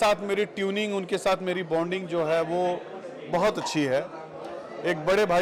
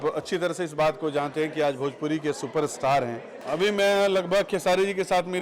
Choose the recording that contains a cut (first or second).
second